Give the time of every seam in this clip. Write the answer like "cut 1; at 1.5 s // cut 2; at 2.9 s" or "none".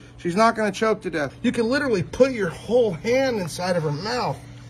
cut 1; at 1.3 s